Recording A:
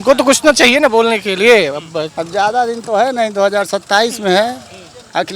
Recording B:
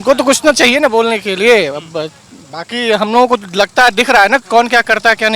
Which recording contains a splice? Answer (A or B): A